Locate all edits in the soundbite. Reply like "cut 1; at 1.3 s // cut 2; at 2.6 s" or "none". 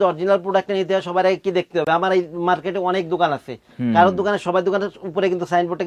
none